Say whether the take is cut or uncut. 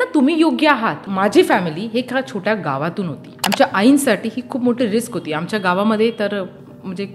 cut